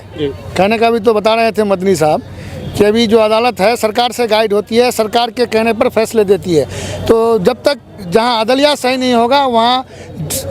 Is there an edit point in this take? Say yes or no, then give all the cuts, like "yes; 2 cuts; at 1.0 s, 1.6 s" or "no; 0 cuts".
no; 0 cuts